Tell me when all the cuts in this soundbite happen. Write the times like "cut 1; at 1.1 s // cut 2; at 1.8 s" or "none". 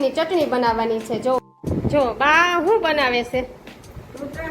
cut 1; at 1.4 s